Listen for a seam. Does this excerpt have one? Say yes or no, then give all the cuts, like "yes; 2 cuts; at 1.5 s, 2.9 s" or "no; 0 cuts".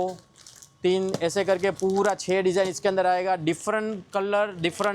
no; 0 cuts